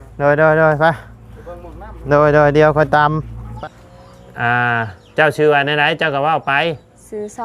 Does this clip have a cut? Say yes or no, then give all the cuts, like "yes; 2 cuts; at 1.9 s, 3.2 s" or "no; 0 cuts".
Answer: yes; 1 cut; at 3.4 s